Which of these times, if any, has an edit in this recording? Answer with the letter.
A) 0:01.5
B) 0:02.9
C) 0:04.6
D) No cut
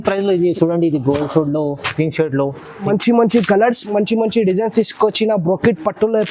B